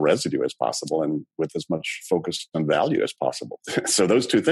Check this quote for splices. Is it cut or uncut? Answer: cut